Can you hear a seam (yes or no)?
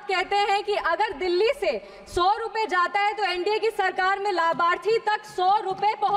no